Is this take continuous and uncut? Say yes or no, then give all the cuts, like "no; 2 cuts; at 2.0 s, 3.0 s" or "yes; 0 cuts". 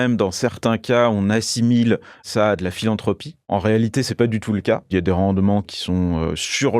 no; 4 cuts; at 2.2 s, 3.5 s, 4.9 s, 5.7 s